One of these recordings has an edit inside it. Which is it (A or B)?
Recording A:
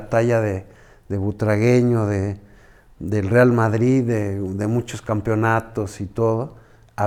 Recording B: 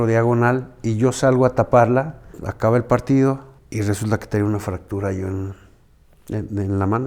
B